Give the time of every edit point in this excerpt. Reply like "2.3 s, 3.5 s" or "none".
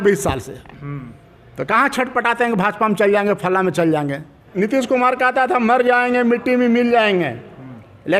4.5 s